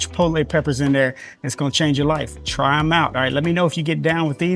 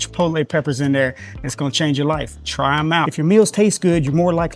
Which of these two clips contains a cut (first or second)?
second